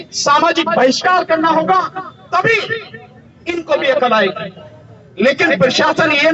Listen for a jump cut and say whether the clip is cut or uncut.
uncut